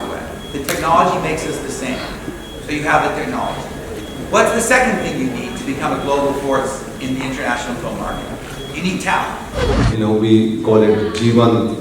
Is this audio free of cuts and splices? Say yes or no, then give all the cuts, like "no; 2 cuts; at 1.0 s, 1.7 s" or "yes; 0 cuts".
no; 1 cut; at 9.7 s